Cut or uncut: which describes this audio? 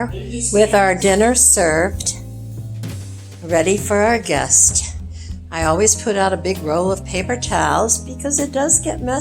cut